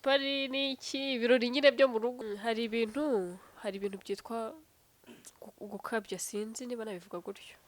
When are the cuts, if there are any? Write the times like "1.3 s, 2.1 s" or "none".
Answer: 2.1 s